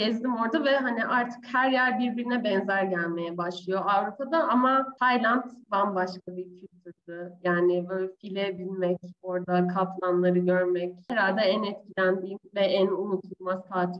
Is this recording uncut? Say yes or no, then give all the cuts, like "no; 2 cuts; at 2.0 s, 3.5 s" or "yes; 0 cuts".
no; 2 cuts; at 4.9 s, 11.0 s